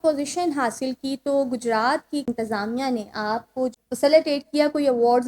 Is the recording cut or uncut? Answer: cut